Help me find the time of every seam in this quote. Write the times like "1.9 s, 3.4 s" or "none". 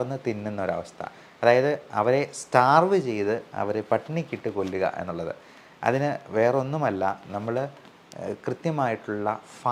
none